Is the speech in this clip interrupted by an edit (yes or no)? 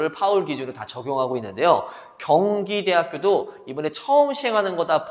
no